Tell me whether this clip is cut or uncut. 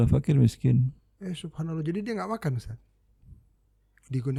uncut